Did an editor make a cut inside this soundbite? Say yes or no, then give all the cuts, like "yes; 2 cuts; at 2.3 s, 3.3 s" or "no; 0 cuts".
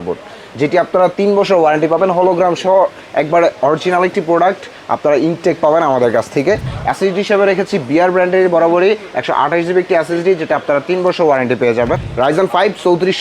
yes; 2 cuts; at 6.7 s, 12.1 s